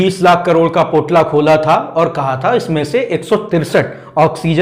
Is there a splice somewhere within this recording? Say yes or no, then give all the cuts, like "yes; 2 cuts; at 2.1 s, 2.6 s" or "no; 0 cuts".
no; 0 cuts